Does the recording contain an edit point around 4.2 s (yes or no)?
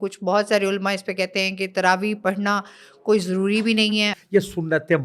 yes